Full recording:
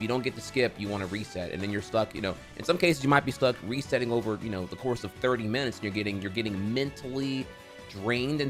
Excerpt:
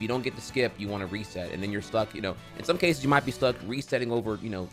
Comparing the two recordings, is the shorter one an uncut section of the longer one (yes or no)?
yes